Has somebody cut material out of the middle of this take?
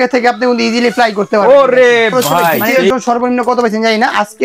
yes; 1 cut; at 2.9 s

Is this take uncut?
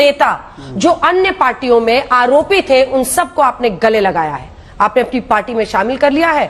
yes; 0 cuts

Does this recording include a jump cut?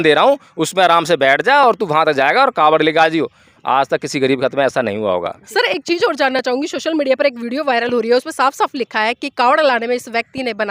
no; 0 cuts

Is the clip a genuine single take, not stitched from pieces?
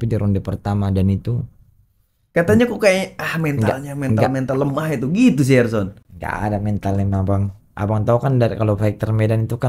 yes; 0 cuts

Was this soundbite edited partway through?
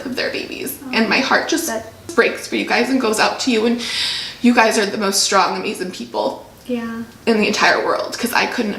yes; 1 cut; at 2.1 s

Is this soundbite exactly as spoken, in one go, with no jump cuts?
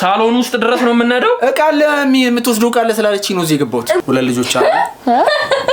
no; 1 cut; at 4.0 s

